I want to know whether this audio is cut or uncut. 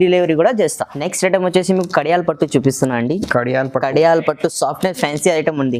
uncut